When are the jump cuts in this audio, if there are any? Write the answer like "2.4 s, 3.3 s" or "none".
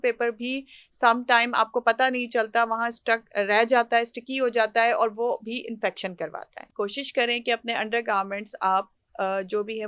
6.5 s